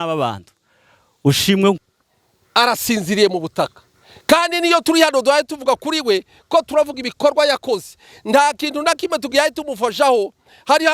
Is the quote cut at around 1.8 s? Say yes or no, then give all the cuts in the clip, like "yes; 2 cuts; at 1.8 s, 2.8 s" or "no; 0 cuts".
yes; 1 cut; at 1.8 s